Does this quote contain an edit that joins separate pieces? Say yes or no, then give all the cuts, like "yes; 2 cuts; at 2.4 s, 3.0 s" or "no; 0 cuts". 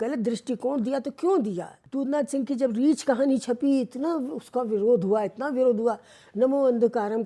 yes; 1 cut; at 1.7 s